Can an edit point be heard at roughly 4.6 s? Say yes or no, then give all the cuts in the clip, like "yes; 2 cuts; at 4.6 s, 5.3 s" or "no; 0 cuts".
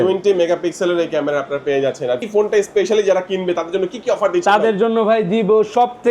no; 1 cut; at 2.2 s